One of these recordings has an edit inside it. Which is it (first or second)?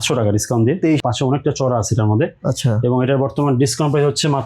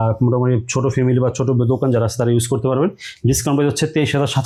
first